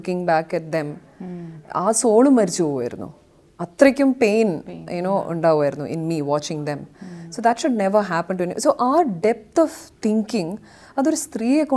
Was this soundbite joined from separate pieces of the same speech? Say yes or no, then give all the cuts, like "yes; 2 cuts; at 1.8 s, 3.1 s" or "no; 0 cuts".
no; 0 cuts